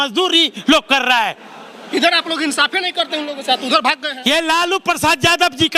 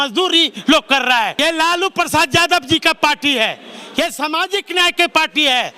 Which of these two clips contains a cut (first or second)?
second